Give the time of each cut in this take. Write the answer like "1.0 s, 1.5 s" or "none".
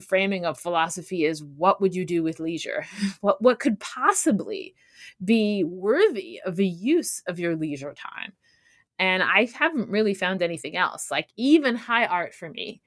none